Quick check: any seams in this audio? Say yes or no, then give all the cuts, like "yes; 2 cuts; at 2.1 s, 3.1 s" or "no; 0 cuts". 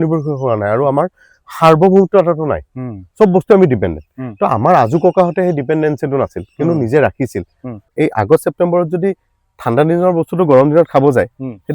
yes; 1 cut; at 7.9 s